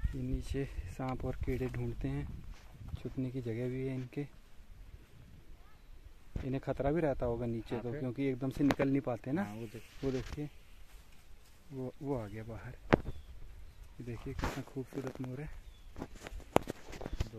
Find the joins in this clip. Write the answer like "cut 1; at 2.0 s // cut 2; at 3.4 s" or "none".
none